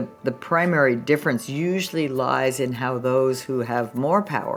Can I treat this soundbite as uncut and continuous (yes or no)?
yes